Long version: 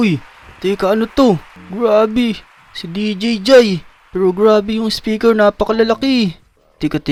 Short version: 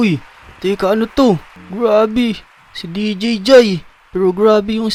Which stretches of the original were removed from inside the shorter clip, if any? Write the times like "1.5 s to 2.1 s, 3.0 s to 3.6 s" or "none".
none